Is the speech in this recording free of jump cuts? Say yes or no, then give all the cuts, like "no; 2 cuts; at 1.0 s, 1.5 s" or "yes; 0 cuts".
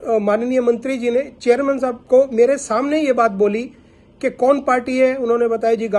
yes; 0 cuts